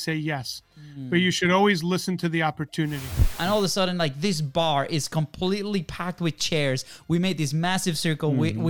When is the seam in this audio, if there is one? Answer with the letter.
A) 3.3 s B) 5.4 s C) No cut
A